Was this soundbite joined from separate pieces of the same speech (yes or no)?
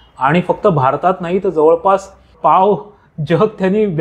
yes